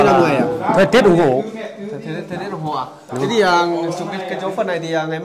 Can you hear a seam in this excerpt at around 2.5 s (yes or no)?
no